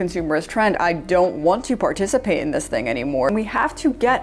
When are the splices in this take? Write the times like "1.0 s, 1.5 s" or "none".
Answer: 0.7 s, 3.3 s